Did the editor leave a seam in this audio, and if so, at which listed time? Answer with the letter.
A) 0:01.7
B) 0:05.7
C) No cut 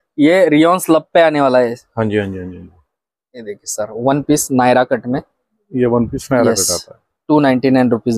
C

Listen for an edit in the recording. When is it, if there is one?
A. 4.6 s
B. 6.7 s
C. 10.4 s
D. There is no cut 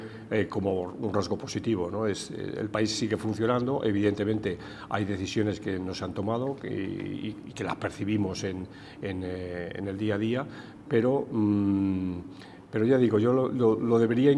D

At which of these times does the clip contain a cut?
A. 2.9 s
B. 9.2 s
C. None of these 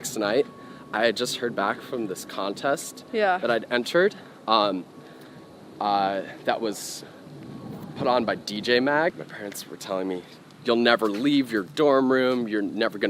B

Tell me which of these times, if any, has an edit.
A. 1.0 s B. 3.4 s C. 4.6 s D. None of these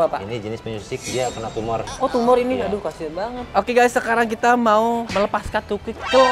B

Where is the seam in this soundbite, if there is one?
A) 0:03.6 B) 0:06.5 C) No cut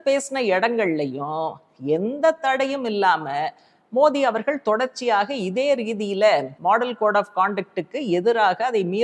B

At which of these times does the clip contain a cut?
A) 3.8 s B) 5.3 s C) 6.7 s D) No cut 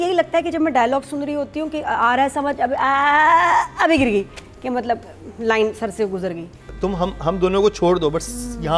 C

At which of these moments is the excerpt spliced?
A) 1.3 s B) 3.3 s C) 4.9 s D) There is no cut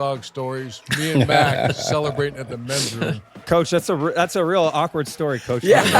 B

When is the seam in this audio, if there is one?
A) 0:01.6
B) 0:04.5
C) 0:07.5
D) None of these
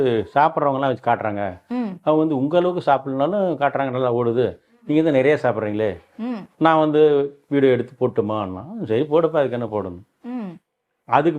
D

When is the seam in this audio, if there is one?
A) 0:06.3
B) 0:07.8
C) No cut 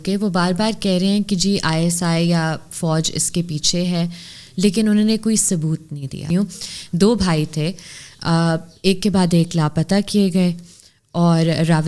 A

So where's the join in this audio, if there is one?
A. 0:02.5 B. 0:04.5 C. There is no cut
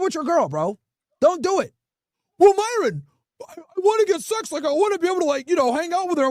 C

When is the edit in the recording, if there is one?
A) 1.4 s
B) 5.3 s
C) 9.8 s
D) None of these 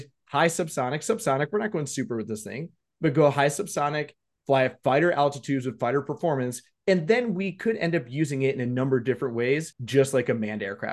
C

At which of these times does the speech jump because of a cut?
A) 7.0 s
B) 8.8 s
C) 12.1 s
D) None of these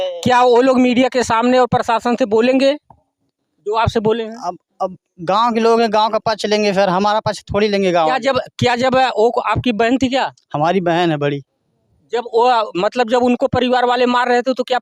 D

